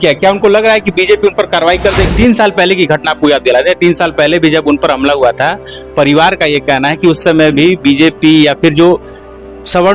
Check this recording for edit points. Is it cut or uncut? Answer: cut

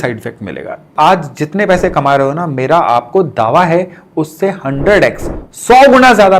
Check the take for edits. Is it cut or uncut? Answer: cut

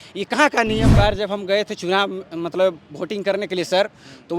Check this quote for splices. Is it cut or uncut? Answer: cut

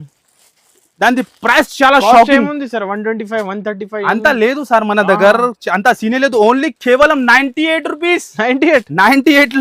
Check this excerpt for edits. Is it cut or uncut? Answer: uncut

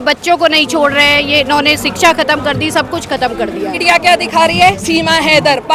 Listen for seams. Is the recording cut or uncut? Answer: cut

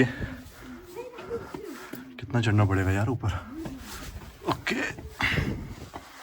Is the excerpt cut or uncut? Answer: uncut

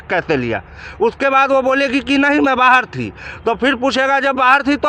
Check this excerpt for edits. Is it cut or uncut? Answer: uncut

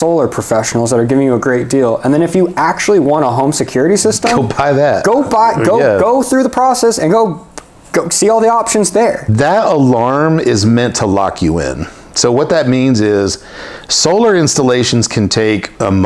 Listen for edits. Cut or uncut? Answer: cut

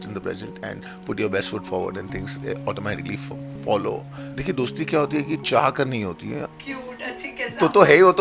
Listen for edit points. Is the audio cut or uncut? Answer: cut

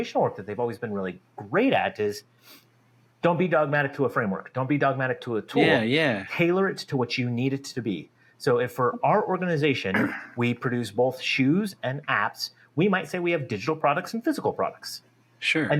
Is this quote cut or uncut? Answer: uncut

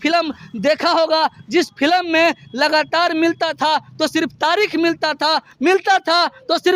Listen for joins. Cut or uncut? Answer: uncut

